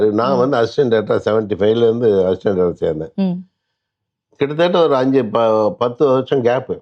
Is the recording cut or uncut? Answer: uncut